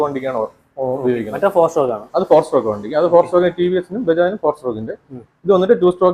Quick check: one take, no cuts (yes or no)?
yes